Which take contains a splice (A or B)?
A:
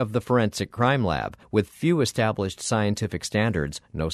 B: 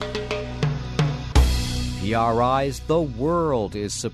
B